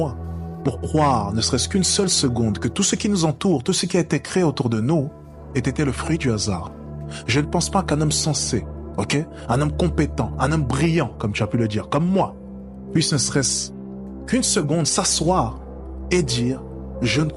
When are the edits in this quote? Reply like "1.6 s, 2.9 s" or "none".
none

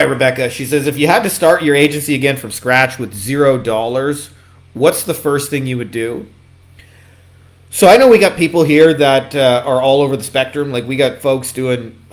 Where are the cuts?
none

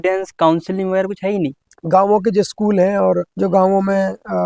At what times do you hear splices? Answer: 1.7 s, 3.3 s

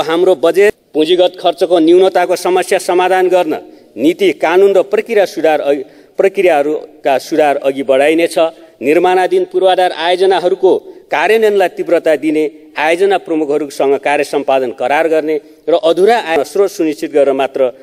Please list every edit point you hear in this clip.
0.8 s, 16.3 s

